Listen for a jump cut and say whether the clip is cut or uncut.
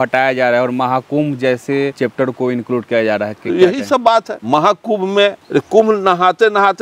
cut